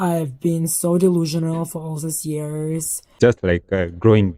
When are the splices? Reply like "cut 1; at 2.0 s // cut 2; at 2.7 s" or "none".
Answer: cut 1; at 3.2 s